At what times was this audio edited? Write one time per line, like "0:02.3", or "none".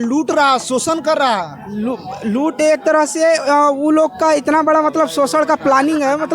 none